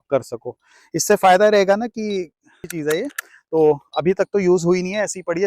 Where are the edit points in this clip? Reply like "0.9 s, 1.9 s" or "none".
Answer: 2.7 s